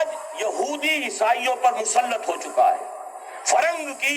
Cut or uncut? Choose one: uncut